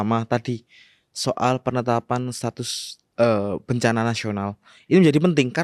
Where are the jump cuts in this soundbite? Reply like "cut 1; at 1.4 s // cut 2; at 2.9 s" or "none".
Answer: none